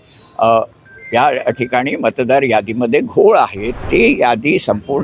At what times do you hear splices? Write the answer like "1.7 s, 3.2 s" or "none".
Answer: 3.7 s